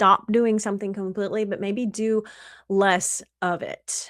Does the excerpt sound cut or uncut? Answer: uncut